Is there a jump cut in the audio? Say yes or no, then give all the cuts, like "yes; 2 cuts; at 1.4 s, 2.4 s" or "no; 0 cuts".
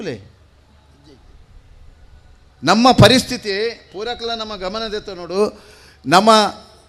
no; 0 cuts